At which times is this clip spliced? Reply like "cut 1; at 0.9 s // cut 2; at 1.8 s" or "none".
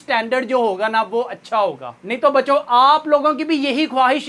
none